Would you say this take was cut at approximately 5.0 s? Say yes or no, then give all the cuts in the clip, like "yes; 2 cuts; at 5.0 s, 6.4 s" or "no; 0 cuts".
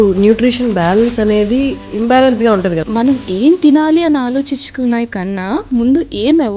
no; 2 cuts; at 1.8 s, 2.8 s